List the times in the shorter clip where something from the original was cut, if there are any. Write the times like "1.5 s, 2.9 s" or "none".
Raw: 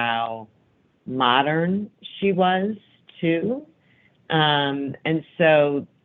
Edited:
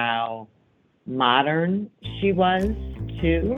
none

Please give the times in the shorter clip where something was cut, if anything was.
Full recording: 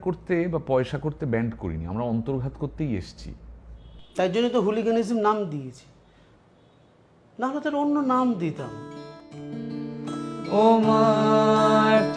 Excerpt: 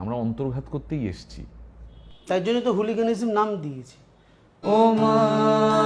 4.5 s

